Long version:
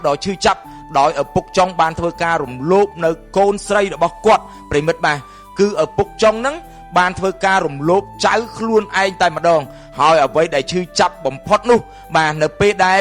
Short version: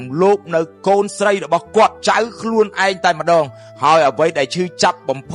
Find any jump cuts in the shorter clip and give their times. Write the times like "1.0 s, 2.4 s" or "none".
2.0 s

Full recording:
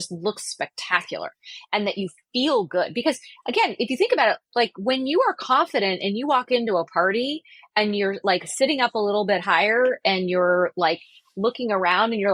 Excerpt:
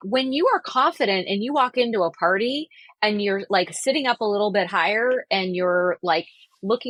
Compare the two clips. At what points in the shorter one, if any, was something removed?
none

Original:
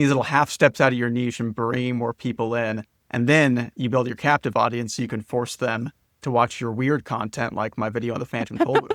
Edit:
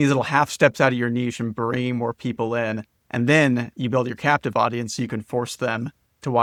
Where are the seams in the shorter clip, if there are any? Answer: none

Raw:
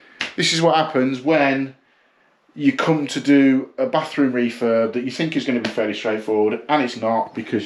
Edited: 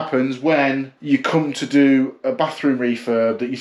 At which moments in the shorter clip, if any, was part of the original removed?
0.9 s

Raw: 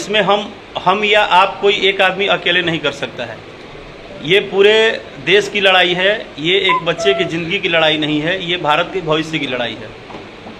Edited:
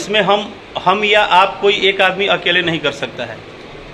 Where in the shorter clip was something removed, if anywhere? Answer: none

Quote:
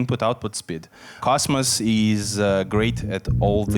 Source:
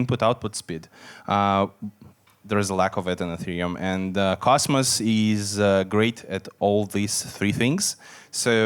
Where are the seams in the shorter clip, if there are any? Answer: 1.2 s

